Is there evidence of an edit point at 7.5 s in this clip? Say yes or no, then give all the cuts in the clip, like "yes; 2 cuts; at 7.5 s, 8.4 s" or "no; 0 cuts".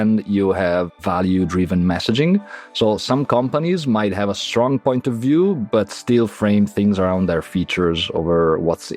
no; 0 cuts